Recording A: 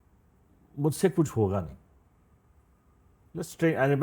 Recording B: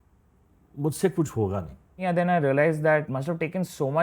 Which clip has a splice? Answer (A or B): B